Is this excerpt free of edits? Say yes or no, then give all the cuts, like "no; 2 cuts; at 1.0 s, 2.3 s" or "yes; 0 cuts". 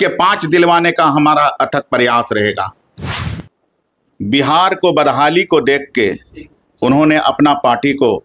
no; 1 cut; at 3.2 s